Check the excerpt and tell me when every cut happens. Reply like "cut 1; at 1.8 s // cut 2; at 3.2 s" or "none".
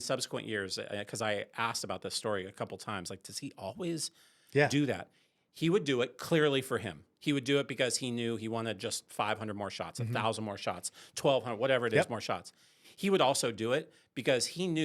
none